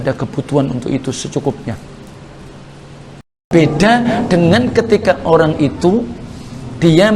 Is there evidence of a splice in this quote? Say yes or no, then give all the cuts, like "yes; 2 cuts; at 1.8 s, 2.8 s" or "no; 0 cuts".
yes; 1 cut; at 3.5 s